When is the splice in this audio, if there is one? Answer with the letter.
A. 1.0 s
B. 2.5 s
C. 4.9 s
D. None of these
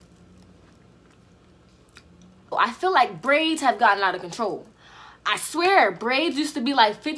B